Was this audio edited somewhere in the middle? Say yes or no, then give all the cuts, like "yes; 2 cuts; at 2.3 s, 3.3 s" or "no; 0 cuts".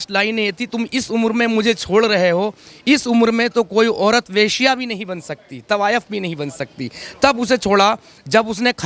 no; 0 cuts